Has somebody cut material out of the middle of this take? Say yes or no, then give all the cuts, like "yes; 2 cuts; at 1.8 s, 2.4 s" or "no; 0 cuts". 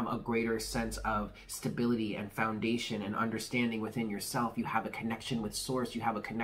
no; 0 cuts